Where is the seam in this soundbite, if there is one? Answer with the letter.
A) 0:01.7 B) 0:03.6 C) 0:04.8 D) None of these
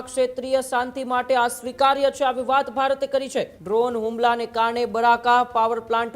B